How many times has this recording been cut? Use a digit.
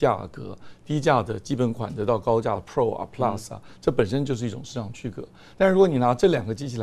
0